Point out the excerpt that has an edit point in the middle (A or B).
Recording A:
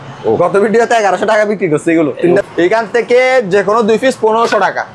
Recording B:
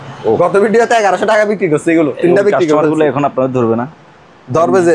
A